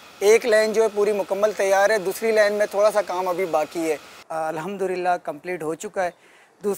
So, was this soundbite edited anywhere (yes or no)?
yes